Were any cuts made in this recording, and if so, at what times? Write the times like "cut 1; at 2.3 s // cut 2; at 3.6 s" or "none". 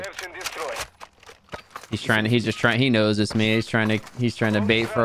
none